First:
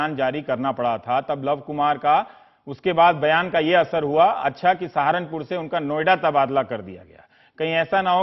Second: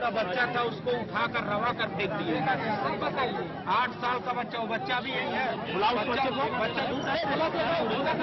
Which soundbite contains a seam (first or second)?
second